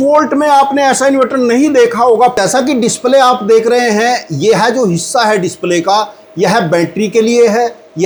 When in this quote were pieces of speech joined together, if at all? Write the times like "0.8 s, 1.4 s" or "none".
none